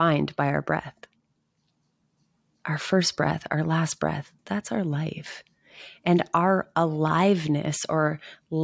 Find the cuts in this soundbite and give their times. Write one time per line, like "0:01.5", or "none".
0:04.3